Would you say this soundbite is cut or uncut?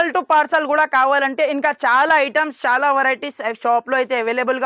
uncut